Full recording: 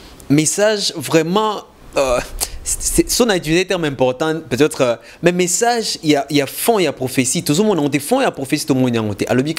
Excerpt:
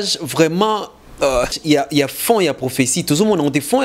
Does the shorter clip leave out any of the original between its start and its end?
yes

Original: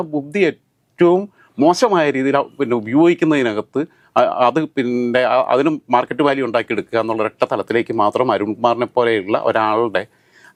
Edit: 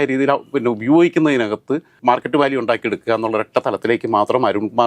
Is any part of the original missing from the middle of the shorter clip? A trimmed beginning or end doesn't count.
yes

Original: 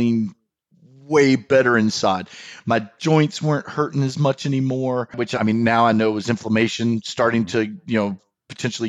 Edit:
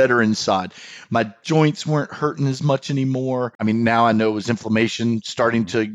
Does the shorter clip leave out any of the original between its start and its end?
yes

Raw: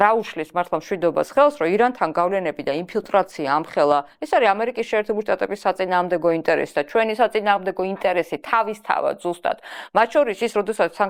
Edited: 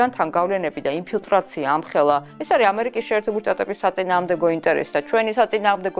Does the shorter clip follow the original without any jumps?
yes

